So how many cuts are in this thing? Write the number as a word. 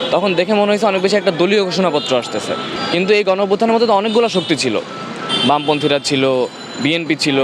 one